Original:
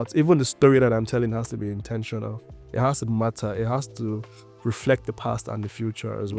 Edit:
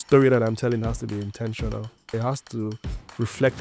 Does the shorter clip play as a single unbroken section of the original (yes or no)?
no